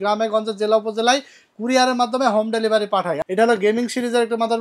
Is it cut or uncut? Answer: cut